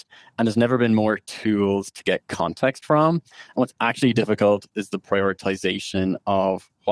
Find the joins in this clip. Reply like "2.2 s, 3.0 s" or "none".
none